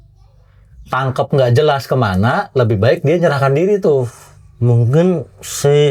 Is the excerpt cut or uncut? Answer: uncut